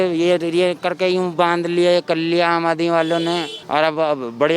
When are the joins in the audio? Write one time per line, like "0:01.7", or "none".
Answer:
0:03.6

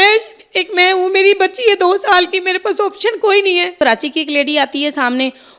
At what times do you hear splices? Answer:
0:03.7

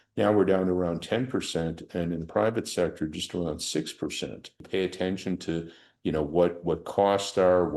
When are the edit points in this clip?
0:04.6

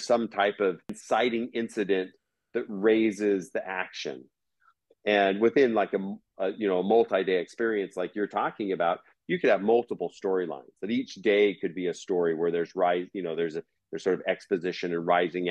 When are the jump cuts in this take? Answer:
0:01.0
0:04.3

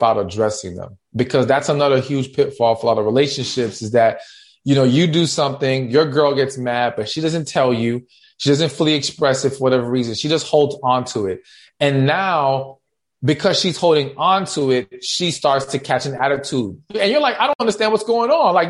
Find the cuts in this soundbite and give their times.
0:16.9

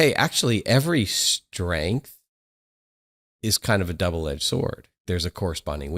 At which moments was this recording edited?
none

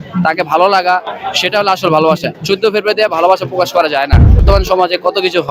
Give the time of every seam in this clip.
0:04.4

